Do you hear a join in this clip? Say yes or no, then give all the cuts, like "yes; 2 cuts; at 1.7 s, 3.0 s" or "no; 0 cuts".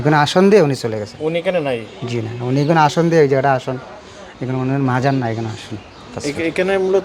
no; 0 cuts